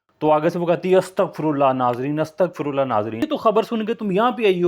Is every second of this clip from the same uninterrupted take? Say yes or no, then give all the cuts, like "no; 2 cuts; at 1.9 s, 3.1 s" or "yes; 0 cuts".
no; 1 cut; at 3.3 s